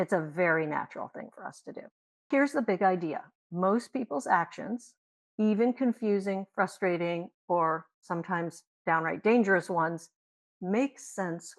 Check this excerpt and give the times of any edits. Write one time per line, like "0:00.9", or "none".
0:02.3